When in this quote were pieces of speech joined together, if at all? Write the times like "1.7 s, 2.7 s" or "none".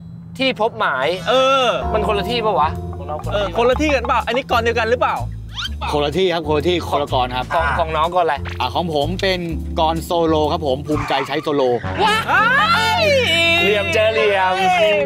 8.5 s